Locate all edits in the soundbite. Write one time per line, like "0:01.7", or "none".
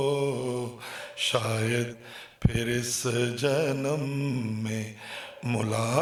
none